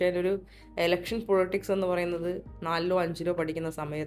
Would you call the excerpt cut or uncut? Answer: uncut